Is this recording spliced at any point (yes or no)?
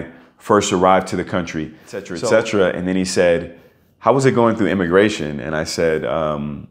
yes